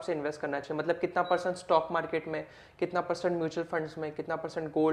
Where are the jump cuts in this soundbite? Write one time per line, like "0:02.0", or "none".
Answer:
none